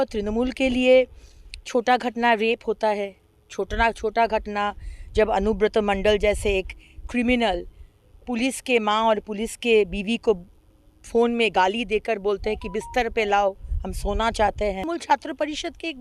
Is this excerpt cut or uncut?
cut